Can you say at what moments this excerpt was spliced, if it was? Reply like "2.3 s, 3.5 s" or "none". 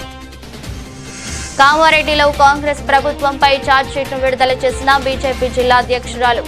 1.5 s